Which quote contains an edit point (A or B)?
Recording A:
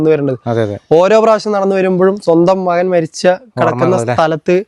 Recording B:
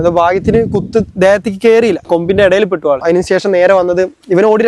B